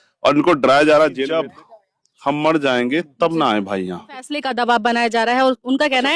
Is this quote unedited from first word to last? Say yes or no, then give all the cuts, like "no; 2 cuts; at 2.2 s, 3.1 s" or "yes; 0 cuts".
no; 2 cuts; at 1.4 s, 4.5 s